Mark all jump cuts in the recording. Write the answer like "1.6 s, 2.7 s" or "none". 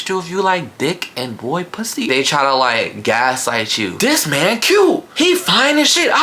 2.1 s, 3.8 s, 5.1 s